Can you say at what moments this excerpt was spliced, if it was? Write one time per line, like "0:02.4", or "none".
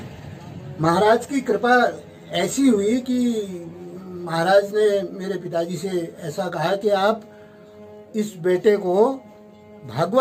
none